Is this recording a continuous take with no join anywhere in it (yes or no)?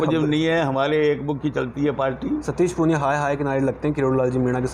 yes